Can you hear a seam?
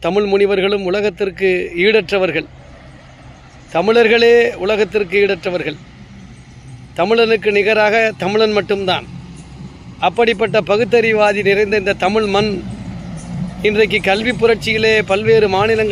no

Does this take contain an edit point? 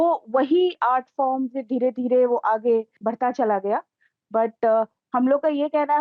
no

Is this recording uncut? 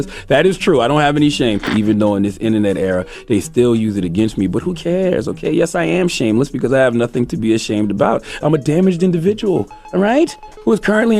no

